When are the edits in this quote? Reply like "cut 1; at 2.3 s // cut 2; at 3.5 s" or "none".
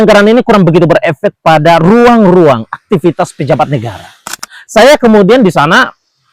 cut 1; at 4.2 s